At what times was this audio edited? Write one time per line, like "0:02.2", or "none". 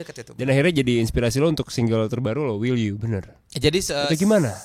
none